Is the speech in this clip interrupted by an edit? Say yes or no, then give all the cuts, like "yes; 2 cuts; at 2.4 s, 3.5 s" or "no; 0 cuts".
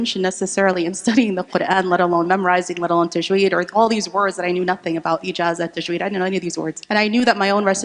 yes; 1 cut; at 6.8 s